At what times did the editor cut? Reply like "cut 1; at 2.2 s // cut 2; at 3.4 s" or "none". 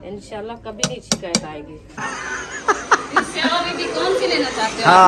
cut 1; at 2.0 s